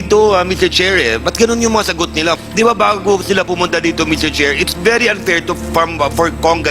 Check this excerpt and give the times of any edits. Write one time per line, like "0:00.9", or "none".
0:02.4